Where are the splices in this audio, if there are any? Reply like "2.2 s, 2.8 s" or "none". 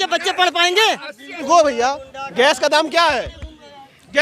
1.4 s